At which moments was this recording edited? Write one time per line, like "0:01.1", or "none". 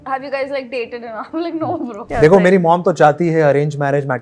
0:02.0